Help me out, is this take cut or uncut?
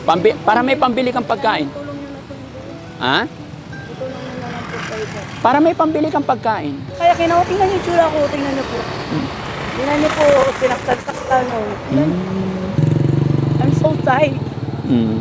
cut